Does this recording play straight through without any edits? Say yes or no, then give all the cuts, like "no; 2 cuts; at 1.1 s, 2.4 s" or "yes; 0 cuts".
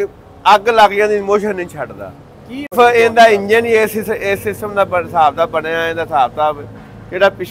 no; 1 cut; at 2.7 s